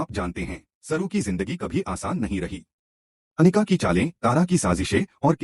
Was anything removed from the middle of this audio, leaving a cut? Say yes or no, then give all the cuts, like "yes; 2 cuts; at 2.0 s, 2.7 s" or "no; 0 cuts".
no; 0 cuts